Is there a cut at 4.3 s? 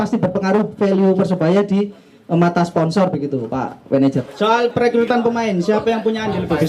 yes; 1 cut; at 4.3 s

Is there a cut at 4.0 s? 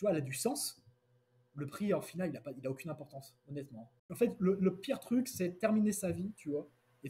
yes; 1 cut; at 4.0 s

